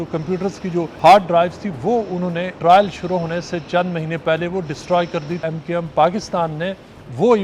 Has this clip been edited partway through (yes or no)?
yes